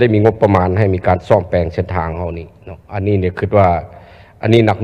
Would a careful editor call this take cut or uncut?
uncut